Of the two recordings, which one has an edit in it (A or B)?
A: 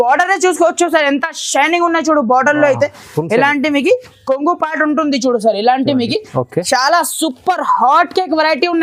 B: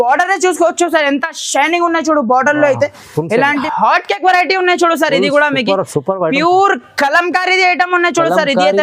B